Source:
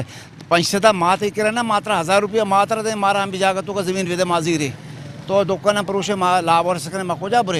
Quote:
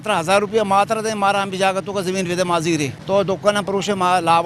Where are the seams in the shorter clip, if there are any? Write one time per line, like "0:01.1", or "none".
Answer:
0:02.9